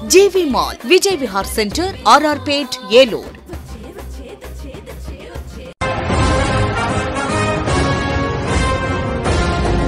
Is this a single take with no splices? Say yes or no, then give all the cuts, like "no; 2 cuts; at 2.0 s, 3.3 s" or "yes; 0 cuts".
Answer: no; 1 cut; at 5.8 s